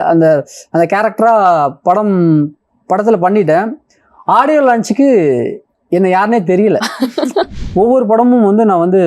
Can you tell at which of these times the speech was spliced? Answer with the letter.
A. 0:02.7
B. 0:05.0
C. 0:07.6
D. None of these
C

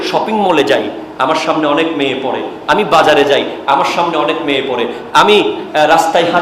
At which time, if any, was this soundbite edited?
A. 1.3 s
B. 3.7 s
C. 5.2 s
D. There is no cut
D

